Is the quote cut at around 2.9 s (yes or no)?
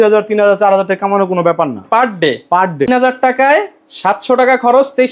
yes